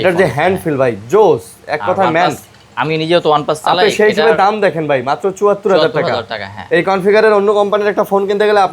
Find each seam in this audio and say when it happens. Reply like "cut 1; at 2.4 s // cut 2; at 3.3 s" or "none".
none